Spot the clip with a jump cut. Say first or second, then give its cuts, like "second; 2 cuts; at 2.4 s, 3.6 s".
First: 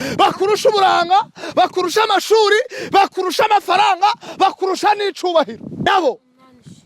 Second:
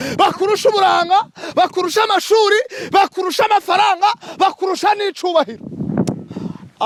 first; 1 cut; at 5.9 s